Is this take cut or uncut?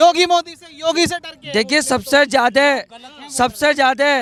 uncut